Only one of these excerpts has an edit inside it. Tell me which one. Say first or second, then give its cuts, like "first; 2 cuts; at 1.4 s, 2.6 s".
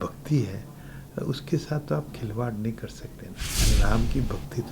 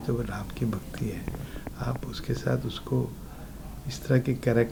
first; 1 cut; at 3.6 s